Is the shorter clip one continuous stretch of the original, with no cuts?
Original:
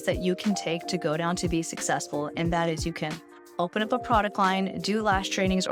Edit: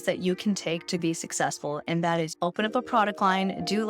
no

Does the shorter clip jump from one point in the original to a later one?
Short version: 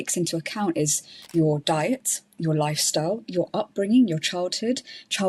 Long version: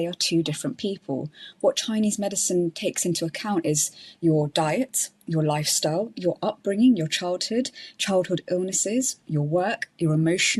no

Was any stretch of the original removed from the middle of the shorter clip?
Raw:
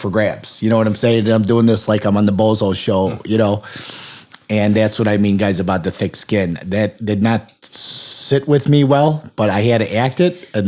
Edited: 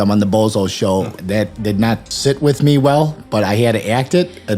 yes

